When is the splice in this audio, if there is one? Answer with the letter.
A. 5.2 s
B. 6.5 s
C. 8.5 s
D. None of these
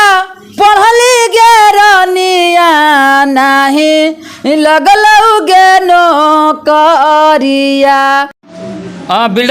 C